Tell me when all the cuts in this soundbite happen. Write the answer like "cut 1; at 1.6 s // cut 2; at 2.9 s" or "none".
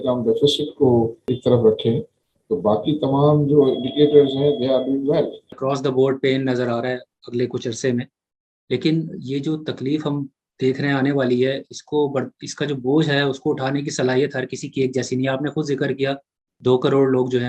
cut 1; at 1.3 s // cut 2; at 5.6 s